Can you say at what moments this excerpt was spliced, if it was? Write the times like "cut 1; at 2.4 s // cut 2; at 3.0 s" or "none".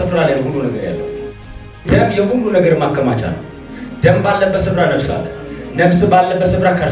cut 1; at 1.8 s